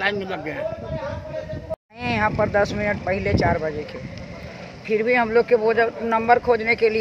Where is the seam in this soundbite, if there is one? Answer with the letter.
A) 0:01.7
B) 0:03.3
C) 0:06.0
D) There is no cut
A